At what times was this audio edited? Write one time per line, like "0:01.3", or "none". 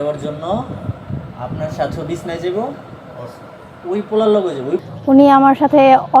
0:04.9

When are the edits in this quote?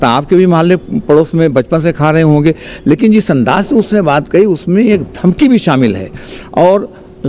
none

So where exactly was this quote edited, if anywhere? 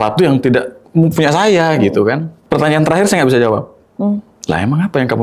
0:02.3
0:04.3

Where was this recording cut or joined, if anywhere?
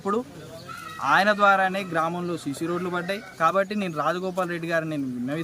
0:03.3

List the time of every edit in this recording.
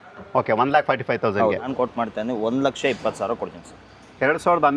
0:01.7

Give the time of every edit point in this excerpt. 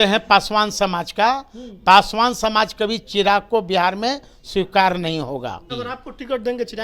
0:05.6

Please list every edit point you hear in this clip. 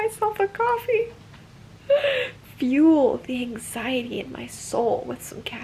none

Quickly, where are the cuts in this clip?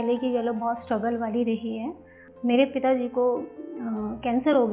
0:02.2

